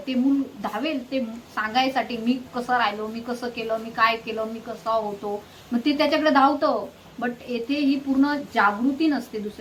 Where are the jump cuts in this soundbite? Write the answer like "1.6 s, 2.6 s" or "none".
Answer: none